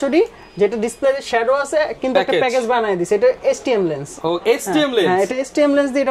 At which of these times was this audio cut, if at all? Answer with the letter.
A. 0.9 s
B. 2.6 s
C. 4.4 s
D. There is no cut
D